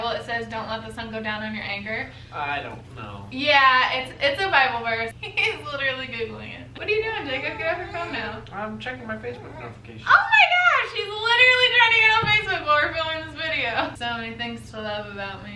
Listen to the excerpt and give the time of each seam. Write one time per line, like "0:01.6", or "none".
0:05.1
0:06.8
0:13.9